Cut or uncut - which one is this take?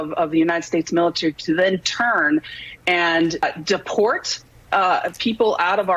uncut